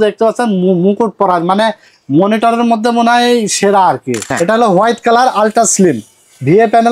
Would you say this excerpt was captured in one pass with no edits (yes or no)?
no